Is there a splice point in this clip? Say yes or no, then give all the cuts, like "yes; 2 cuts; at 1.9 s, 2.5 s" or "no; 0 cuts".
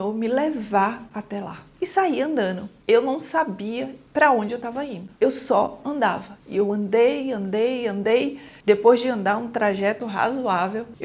no; 0 cuts